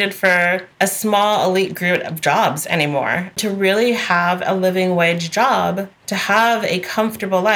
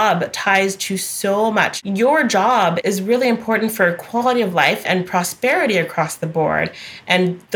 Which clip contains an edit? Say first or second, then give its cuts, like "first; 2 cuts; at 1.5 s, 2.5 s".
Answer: second; 3 cuts; at 1.7 s, 2.8 s, 4.8 s